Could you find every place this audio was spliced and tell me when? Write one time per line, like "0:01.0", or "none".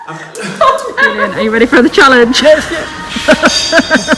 0:01.2